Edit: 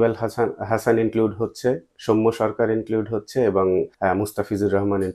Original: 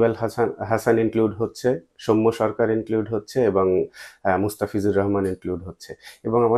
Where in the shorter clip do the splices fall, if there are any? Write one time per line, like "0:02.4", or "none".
0:03.9